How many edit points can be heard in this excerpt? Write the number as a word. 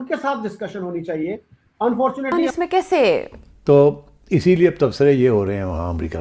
one